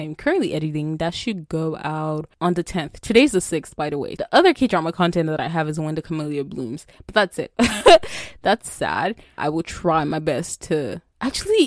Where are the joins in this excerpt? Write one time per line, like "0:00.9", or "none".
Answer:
0:04.2
0:07.5
0:09.4